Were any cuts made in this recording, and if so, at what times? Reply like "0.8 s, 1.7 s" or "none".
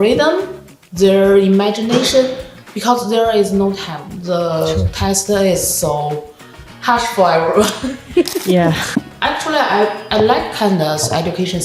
8.8 s